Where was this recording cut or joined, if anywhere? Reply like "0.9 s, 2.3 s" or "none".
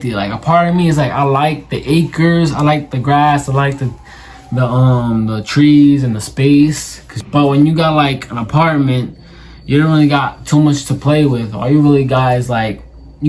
none

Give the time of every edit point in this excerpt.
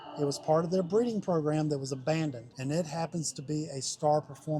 2.5 s

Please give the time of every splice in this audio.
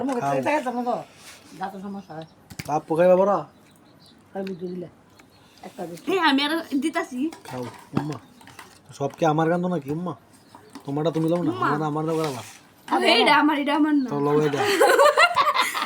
none

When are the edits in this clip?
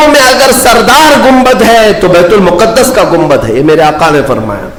none

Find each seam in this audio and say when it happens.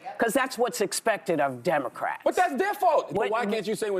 3.1 s

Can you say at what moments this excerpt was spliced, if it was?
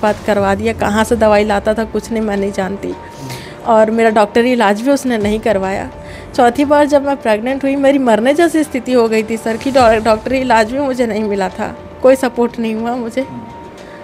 none

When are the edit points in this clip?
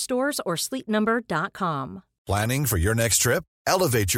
2.1 s

